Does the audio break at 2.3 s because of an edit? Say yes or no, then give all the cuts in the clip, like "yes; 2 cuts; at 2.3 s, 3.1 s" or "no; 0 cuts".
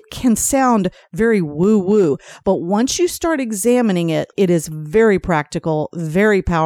yes; 2 cuts; at 2.3 s, 4.3 s